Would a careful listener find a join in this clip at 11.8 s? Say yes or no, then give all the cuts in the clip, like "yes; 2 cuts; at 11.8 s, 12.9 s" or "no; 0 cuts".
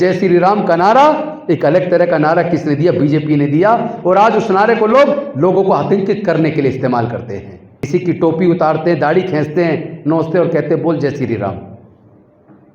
no; 1 cut; at 7.9 s